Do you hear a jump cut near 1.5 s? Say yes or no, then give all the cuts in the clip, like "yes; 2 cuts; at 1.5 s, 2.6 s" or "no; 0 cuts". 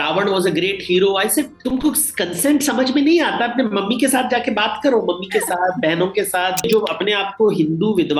yes; 2 cuts; at 1.5 s, 6.7 s